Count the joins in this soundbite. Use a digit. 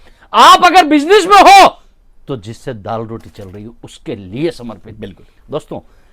0